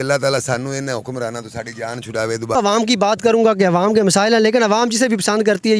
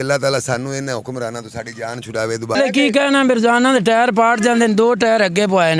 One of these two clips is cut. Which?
second; 1 cut; at 2.5 s

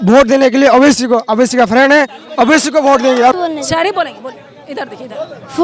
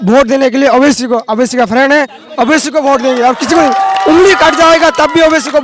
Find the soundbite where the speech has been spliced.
first; 1 cut; at 3.4 s

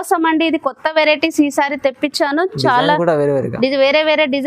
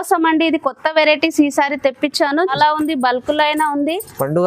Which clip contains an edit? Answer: second; 1 cut; at 2.5 s

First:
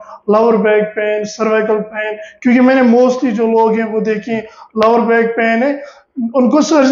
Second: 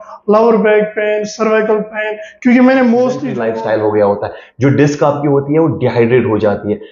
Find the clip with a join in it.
second; 1 cut; at 3.3 s

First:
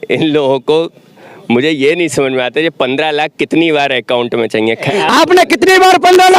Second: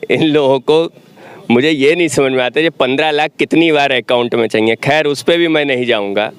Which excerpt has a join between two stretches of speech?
first; 1 cut; at 4.9 s

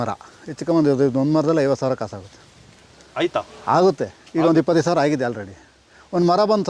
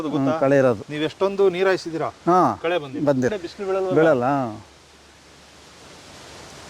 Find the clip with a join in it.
second; 1 cut; at 3.4 s

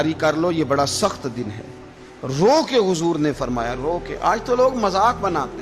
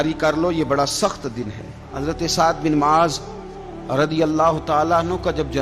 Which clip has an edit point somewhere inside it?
second; 1 cut; at 1.9 s

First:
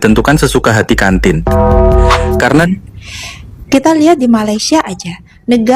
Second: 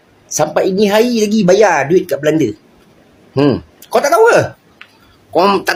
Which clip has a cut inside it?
first; 1 cut; at 2.7 s

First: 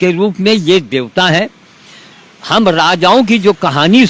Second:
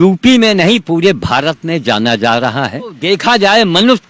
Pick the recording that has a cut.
second; 1 cut; at 3.0 s

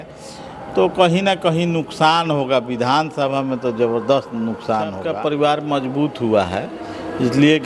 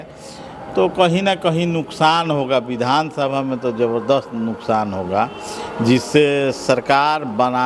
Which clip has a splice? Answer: first; 1 cut; at 5.1 s

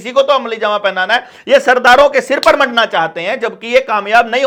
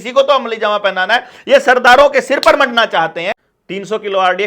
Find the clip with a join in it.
second; 1 cut; at 3.3 s

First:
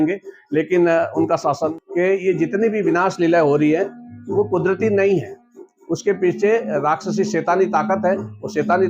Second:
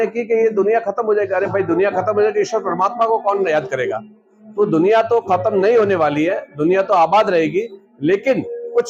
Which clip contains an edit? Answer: first; 1 cut; at 1.8 s

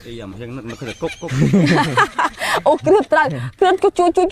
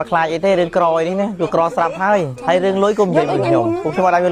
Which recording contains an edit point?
second; 1 cut; at 2.3 s

